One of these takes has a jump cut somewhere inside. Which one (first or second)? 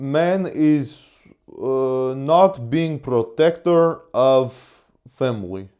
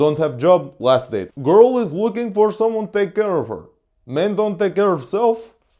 second